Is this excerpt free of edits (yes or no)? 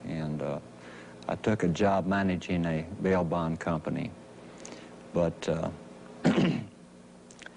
no